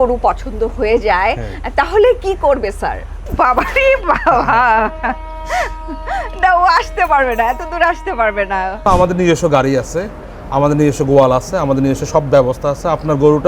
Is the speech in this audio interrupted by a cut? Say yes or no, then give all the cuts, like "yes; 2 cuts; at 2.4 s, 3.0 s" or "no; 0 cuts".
yes; 2 cuts; at 3.2 s, 8.9 s